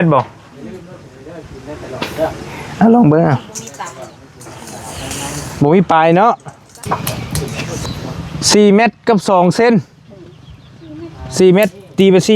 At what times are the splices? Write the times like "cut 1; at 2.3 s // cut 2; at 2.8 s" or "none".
cut 1; at 6.9 s